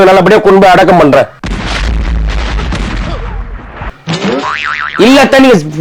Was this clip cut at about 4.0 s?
no; 1 cut; at 1.3 s

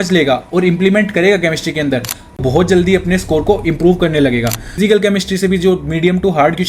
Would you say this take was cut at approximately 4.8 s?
yes; 1 cut; at 4.8 s

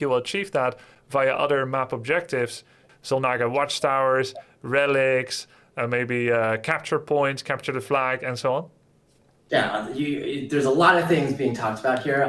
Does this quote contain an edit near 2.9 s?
yes; 1 cut; at 2.9 s

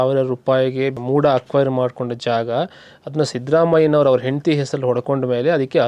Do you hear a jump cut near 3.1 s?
no; 1 cut; at 1.0 s

